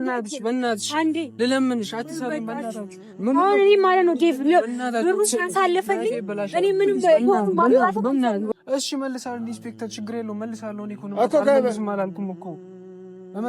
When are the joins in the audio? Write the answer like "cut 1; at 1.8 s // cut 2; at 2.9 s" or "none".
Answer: cut 1; at 8.5 s